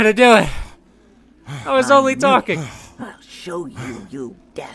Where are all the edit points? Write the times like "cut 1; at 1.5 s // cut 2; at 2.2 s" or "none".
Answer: cut 1; at 2.5 s